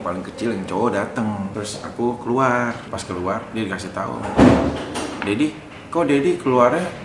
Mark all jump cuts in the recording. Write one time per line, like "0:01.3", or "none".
0:01.5
0:02.9

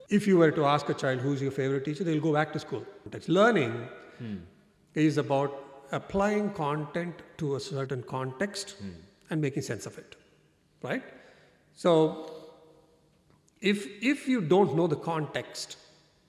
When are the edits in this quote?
0:03.0

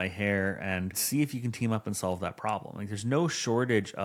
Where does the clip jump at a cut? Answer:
0:01.0

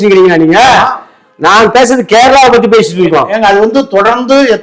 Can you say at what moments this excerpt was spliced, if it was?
none

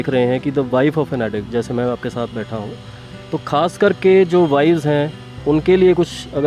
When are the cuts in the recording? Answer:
none

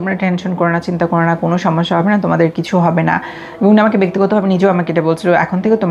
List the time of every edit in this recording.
none

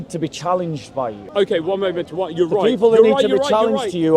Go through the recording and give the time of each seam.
0:01.2

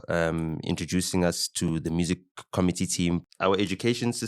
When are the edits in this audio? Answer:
0:03.2

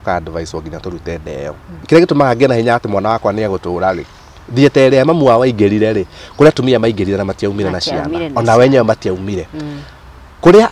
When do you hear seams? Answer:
0:01.8

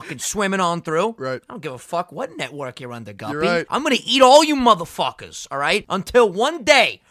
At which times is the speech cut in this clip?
0:03.7
0:05.9

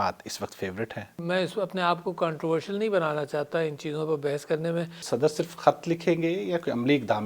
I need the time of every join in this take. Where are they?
0:01.1
0:05.0

